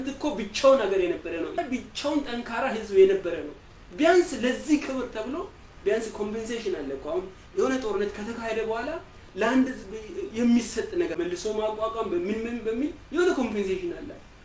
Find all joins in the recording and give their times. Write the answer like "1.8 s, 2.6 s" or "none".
1.6 s, 11.1 s